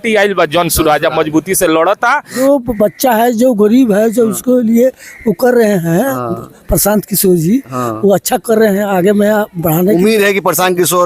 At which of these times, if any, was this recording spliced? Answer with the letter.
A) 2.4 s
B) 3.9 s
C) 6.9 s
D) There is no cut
A